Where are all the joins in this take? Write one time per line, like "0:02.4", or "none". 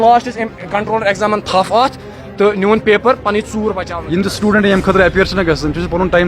0:03.9